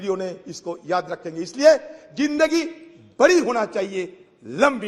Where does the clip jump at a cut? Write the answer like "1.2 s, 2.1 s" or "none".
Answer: none